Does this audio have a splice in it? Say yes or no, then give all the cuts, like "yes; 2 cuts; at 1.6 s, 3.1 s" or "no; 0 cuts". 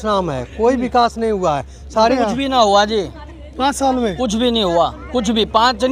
yes; 1 cut; at 2.1 s